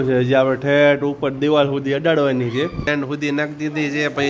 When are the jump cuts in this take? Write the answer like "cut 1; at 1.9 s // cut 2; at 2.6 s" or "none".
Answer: cut 1; at 2.9 s